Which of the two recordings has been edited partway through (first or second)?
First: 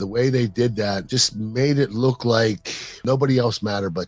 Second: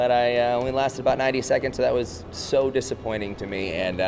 first